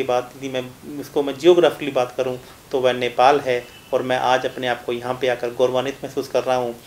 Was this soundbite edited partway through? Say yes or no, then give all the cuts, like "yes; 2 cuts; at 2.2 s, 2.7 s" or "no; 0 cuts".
no; 0 cuts